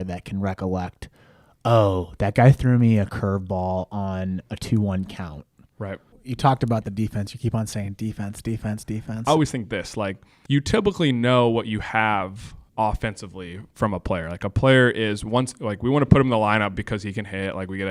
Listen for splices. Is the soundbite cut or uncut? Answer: cut